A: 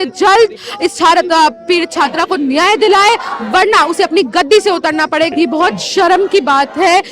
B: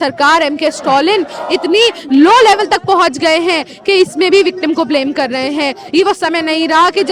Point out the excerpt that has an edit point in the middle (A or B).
A